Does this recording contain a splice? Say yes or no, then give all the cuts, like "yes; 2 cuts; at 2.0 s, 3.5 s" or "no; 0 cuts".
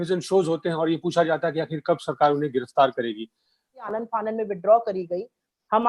yes; 1 cut; at 3.9 s